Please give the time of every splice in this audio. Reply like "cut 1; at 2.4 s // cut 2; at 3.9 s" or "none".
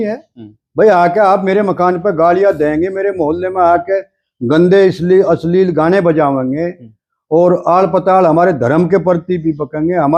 none